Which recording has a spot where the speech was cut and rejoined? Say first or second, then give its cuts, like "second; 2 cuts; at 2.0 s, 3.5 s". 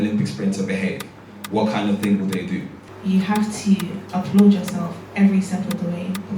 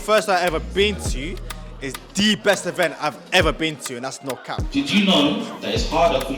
second; 1 cut; at 4.5 s